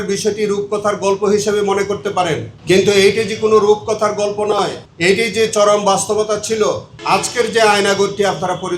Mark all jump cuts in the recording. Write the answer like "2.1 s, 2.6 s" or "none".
2.5 s, 4.8 s, 6.9 s